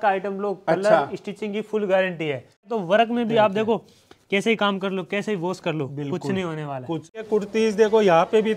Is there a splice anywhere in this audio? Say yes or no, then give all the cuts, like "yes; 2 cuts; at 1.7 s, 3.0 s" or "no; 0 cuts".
yes; 2 cuts; at 2.7 s, 7.3 s